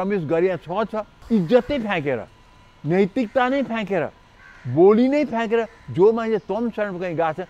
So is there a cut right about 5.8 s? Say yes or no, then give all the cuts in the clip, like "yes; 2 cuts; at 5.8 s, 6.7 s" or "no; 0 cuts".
no; 1 cut; at 1.1 s